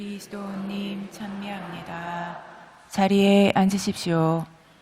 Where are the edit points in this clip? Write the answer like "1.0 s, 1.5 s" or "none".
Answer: none

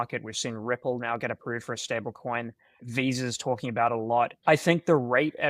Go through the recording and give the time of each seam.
2.8 s, 4.4 s

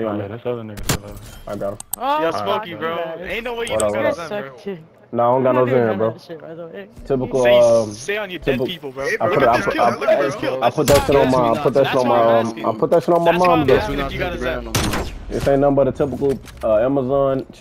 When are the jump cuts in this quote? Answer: none

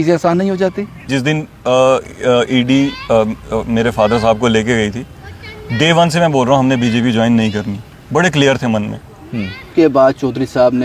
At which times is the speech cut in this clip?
1.1 s, 9.6 s

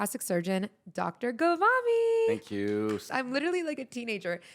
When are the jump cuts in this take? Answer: 3.1 s

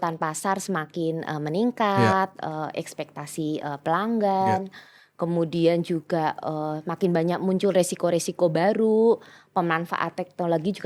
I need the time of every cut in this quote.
none

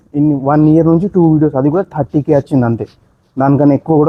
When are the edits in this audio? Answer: none

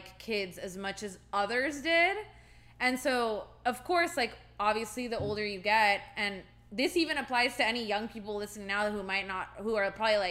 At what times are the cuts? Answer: none

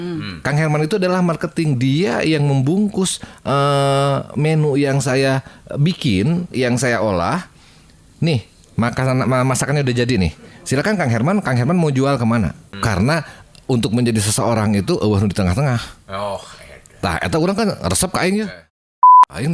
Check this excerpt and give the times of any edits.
12.8 s

